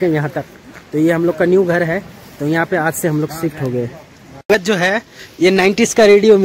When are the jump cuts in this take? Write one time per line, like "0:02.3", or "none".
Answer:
0:04.5